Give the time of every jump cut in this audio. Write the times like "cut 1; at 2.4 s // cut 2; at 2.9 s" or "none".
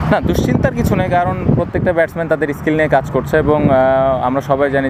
none